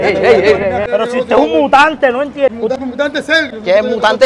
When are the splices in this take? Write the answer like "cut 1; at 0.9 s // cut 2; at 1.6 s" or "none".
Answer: cut 1; at 0.8 s // cut 2; at 2.8 s